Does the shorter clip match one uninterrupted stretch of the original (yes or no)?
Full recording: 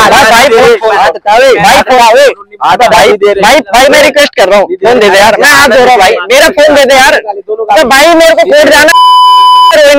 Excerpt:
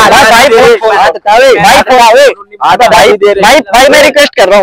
yes